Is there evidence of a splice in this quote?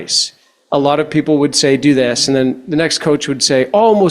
no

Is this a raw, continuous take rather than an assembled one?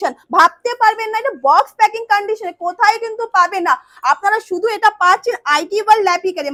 yes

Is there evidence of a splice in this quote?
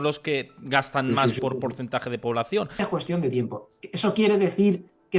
yes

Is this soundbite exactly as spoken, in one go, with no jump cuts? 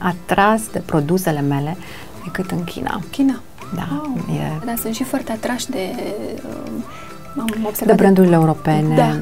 no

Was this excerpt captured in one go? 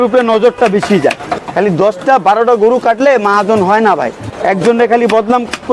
no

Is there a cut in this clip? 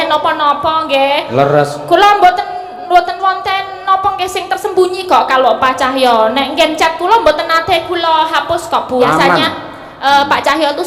yes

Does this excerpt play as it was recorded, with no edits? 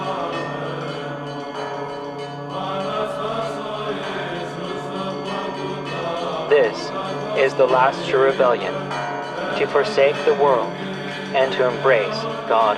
yes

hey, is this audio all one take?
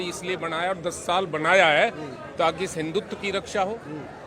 yes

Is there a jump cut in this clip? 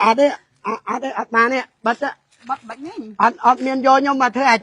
no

